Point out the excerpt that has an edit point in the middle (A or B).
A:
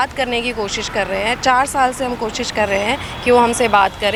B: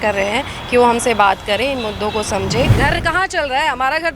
B